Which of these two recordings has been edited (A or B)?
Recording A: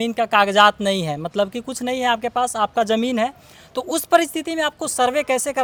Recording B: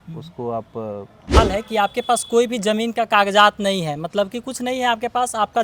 B